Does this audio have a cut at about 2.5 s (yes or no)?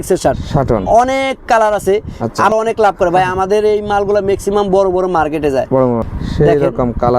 yes